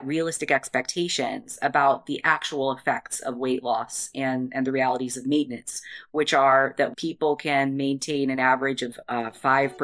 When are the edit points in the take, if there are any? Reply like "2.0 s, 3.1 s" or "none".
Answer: 6.9 s, 8.9 s